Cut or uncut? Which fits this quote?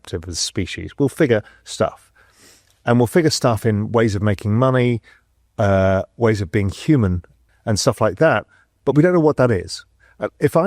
uncut